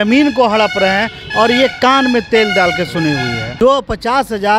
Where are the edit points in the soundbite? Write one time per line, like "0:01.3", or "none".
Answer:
0:03.4